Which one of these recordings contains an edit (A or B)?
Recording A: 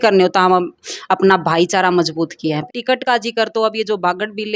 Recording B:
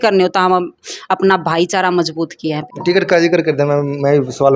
A